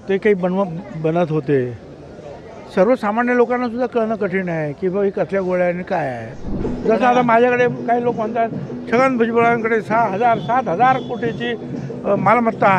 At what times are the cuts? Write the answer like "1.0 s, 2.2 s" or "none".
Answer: 6.4 s